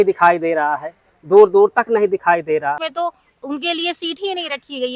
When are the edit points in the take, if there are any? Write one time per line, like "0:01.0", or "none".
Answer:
0:02.9